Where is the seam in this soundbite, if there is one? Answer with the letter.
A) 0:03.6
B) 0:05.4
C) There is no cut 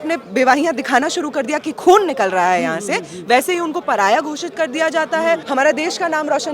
B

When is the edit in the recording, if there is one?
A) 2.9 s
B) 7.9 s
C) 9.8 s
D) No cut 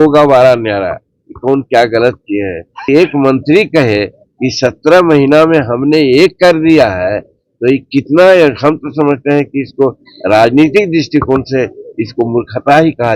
A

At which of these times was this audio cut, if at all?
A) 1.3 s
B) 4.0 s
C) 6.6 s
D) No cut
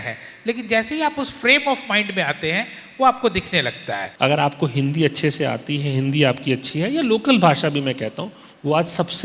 B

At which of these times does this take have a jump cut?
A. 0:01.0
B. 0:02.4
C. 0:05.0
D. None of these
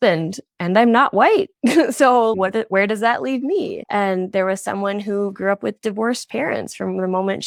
D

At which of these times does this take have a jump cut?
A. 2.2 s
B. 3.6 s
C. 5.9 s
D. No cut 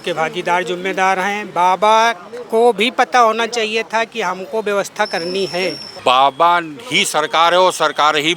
C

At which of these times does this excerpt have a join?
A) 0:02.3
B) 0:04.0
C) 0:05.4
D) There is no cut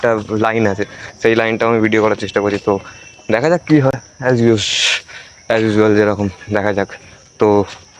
D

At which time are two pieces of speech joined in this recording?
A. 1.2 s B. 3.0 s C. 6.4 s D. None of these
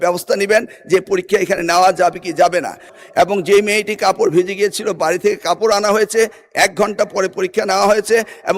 B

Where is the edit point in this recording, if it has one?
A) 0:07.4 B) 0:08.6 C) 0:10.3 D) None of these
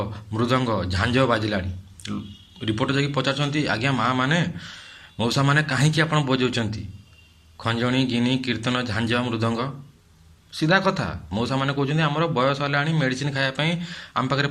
D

